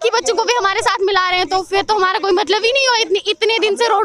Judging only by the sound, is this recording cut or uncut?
uncut